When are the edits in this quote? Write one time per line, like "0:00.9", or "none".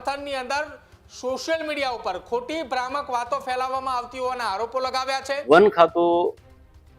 0:05.4

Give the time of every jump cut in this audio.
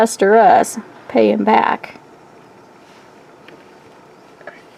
none

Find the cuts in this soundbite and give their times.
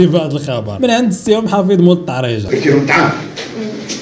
0:02.4

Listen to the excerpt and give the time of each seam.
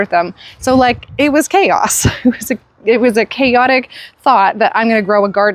none

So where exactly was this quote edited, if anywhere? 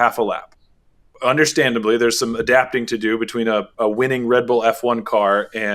0:00.9

